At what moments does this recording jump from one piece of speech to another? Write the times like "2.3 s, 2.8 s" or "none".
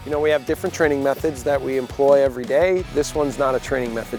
none